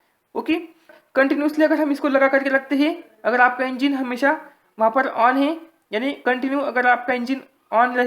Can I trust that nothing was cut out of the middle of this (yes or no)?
no